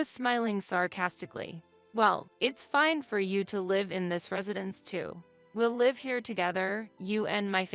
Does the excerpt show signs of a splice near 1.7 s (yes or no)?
yes